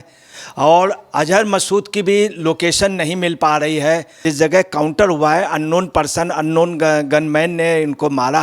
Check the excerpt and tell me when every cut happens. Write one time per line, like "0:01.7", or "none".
0:04.2

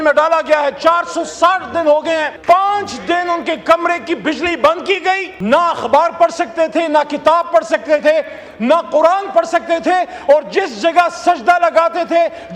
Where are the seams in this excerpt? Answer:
0:02.3
0:05.3

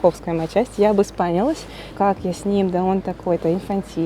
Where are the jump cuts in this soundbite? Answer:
0:01.9

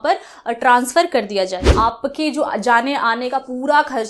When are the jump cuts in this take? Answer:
0:01.6

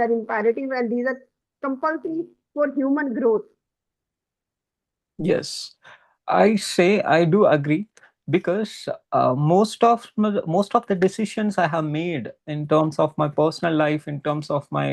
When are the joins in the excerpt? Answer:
none

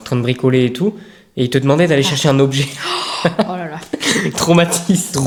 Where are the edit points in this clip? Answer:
none

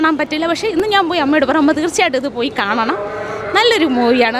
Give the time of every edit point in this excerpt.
none

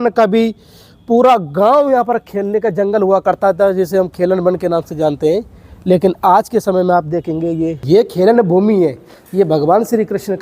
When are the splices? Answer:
0:07.8

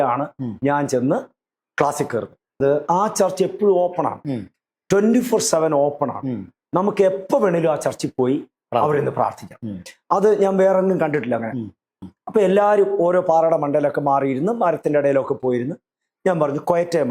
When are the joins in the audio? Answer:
0:02.6
0:11.9

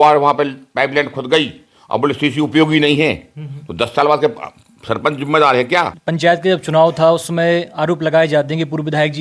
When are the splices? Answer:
0:06.0

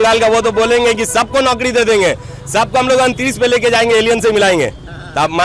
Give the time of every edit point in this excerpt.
none

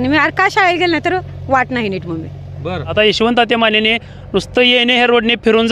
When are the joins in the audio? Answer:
0:02.9

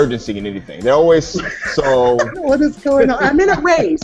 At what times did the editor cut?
0:02.4

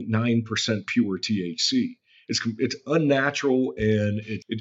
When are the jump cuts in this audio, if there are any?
none

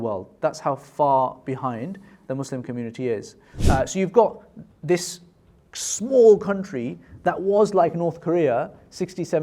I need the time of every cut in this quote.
0:03.5

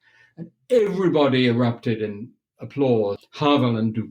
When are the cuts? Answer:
0:03.2

